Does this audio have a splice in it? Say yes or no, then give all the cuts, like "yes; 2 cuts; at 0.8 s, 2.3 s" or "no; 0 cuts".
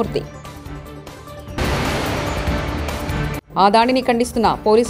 no; 0 cuts